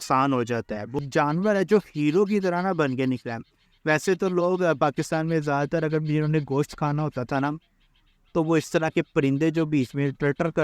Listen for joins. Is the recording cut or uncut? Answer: cut